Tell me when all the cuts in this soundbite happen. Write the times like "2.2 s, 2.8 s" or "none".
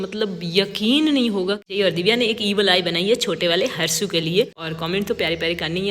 1.7 s, 4.7 s